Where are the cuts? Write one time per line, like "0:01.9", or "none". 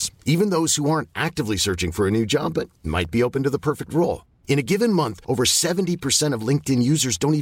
none